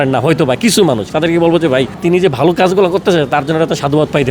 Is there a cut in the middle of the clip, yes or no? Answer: yes